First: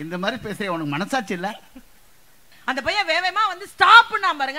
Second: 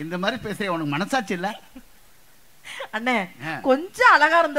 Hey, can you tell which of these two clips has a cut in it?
first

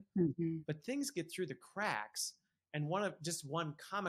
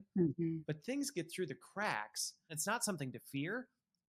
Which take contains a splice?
second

